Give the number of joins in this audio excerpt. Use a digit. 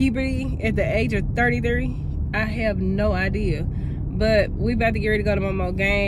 0